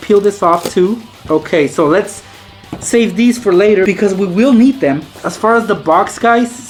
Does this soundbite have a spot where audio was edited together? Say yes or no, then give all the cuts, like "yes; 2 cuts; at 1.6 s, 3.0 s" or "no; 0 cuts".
no; 0 cuts